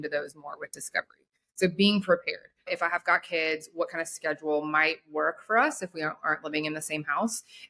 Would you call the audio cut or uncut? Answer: cut